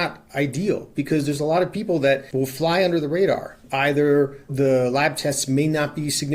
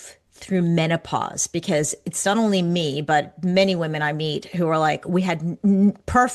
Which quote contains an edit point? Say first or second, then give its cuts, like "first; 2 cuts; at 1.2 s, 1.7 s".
first; 1 cut; at 2.3 s